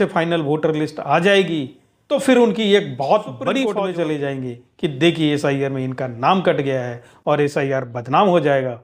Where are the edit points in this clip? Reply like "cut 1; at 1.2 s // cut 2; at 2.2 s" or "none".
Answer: cut 1; at 3.7 s

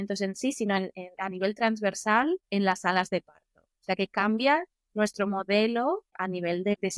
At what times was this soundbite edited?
none

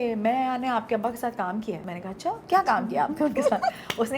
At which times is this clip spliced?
cut 1; at 2.3 s

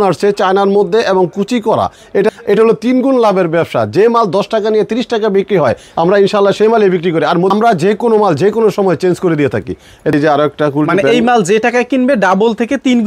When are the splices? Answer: cut 1; at 2.3 s // cut 2; at 7.5 s // cut 3; at 10.1 s

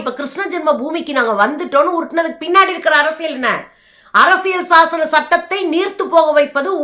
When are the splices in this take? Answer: none

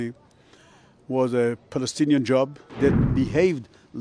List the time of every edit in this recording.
cut 1; at 2.6 s

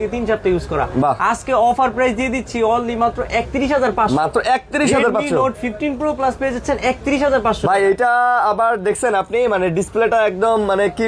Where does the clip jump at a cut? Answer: none

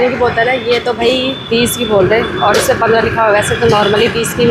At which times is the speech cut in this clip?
none

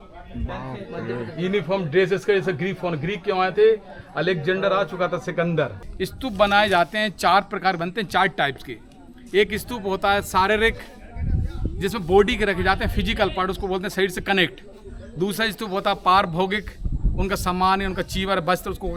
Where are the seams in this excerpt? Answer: cut 1; at 5.8 s

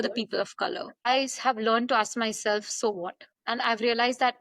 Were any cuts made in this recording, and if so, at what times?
cut 1; at 1.0 s

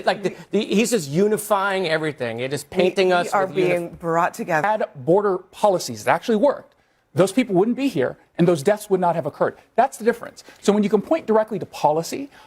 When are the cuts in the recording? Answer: cut 1; at 4.6 s

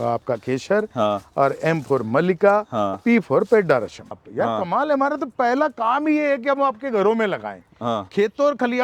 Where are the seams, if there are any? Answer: cut 1; at 4.2 s

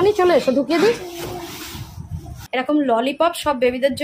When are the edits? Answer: cut 1; at 2.4 s

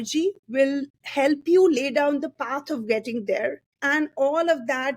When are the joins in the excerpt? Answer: cut 1; at 3.7 s

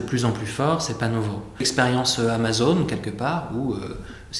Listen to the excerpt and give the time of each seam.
cut 1; at 1.7 s

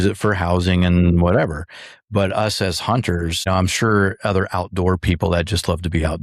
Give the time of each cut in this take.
cut 1; at 3.5 s

